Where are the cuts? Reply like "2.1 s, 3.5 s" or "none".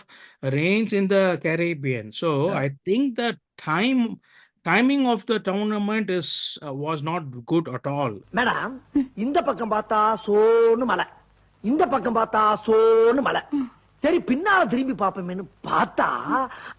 none